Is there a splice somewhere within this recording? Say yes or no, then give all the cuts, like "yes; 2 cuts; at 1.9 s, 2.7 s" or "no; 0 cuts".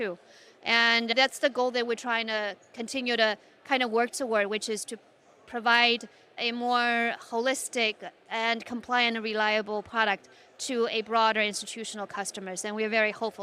yes; 2 cuts; at 1.1 s, 6.4 s